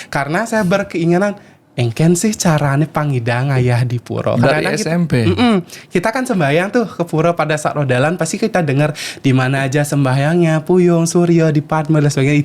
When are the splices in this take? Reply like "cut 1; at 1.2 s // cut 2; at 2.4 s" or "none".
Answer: none